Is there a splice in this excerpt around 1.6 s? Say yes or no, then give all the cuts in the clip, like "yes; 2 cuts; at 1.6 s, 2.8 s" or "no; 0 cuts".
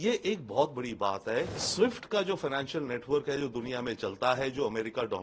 yes; 1 cut; at 1.6 s